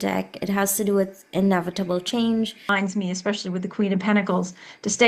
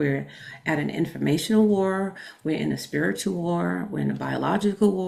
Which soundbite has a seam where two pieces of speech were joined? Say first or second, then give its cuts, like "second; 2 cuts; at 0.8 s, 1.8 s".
first; 1 cut; at 2.7 s